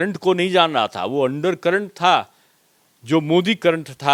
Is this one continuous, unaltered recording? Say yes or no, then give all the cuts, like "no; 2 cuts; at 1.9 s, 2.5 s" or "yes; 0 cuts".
yes; 0 cuts